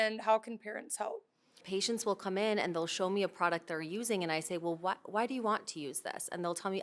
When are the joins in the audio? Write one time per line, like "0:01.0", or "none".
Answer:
0:01.6